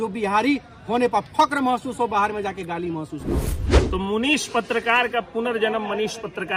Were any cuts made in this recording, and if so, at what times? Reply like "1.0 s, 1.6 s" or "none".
3.6 s